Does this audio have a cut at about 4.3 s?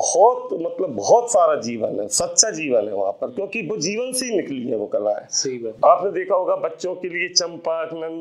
no; 1 cut; at 5.7 s

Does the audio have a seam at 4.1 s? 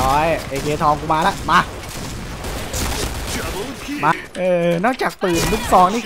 yes; 1 cut; at 4.1 s

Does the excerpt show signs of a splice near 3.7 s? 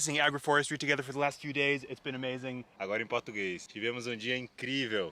yes; 1 cut; at 3.7 s

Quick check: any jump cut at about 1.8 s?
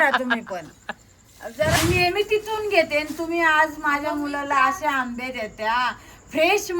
yes; 1 cut; at 1.8 s

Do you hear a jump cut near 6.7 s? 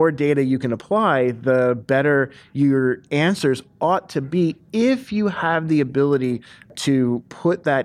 yes; 1 cut; at 6.7 s

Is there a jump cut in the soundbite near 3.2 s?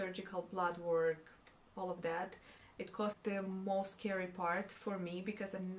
yes; 1 cut; at 3.2 s

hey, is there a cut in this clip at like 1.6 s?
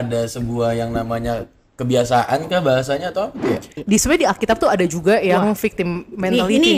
no; 1 cut; at 3.7 s

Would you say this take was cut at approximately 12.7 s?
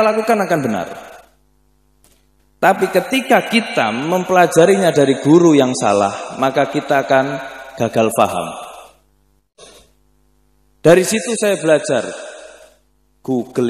no; 1 cut; at 9.6 s

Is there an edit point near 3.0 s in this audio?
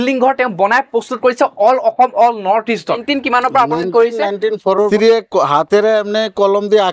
yes; 2 cuts; at 3.0 s, 4.9 s

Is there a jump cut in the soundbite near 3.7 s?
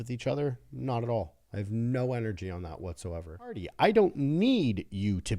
yes; 1 cut; at 3.7 s

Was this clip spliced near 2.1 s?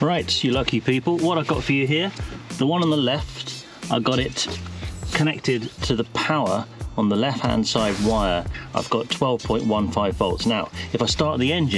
no; 0 cuts

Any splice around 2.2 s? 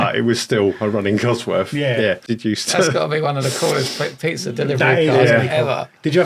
yes; 1 cut; at 2.2 s

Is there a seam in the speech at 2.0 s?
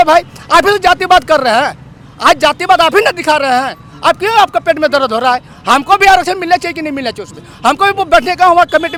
no; 0 cuts

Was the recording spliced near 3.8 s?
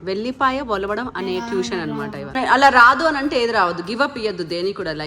no; 1 cut; at 2.3 s

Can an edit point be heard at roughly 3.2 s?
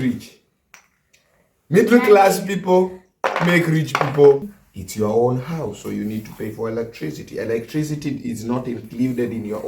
no; 1 cut; at 4.5 s

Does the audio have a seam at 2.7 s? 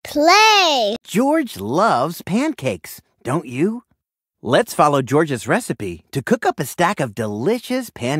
no; 1 cut; at 1.1 s

